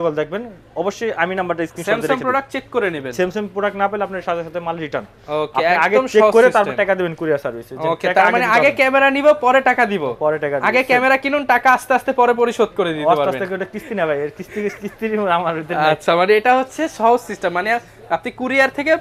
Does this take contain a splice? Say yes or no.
no